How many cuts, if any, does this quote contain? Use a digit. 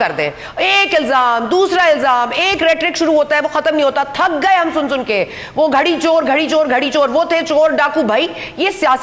0